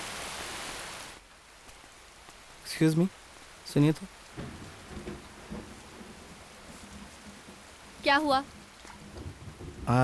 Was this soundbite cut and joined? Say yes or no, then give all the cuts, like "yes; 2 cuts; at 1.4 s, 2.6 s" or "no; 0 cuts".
no; 0 cuts